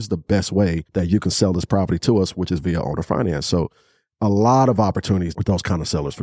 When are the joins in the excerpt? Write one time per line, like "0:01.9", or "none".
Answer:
0:00.8
0:05.3